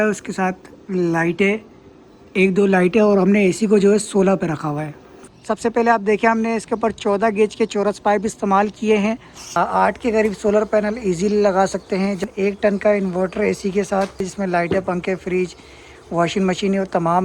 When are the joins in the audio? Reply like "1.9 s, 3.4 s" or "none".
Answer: 5.2 s, 9.6 s, 12.3 s, 14.3 s

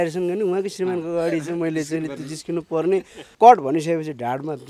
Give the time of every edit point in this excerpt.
3.3 s

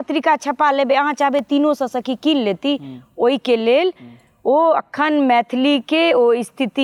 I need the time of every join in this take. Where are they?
none

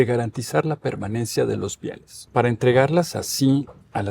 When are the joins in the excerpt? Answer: 2.1 s

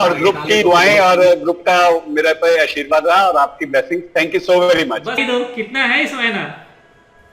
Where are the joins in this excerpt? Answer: 5.2 s

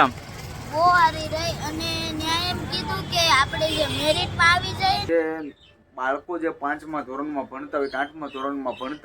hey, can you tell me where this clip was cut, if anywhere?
5.0 s

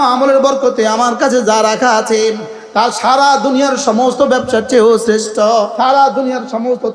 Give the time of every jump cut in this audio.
5.7 s

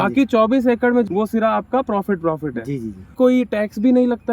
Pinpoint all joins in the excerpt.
1.1 s, 3.2 s

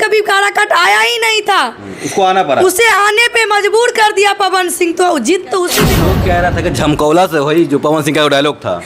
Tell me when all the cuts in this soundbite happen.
6.0 s

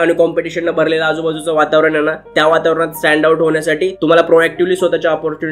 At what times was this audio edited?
none

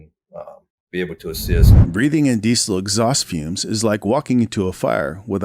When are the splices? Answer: 1.6 s

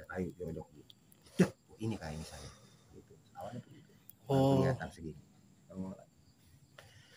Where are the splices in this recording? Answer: none

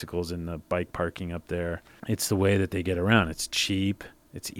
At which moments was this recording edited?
1.9 s

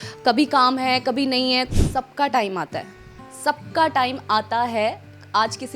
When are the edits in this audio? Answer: 1.7 s

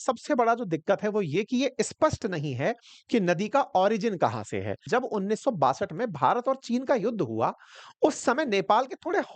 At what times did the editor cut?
4.8 s

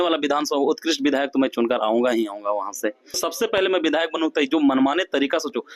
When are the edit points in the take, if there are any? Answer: 3.3 s

